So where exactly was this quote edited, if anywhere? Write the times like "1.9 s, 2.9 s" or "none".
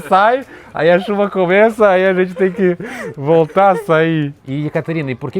4.4 s